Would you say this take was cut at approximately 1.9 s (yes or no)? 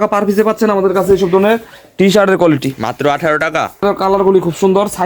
no